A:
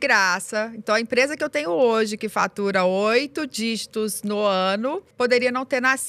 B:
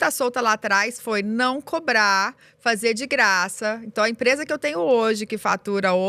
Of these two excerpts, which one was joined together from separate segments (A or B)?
A